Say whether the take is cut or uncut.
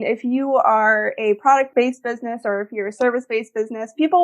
cut